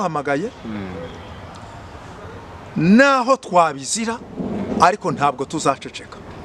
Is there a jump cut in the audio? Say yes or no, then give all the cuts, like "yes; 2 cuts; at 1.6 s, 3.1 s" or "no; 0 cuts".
no; 0 cuts